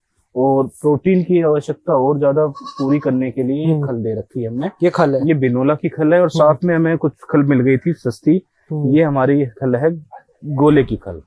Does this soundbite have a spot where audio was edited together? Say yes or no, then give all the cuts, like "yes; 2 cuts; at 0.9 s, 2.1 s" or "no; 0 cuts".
no; 0 cuts